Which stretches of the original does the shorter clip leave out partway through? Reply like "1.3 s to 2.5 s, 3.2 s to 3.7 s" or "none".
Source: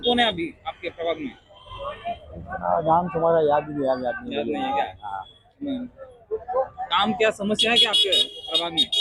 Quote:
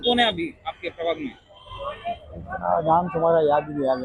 none